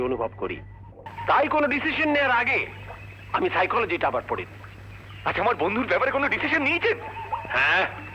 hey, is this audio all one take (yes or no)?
yes